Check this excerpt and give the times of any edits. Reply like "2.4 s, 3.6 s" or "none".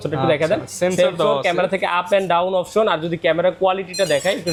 none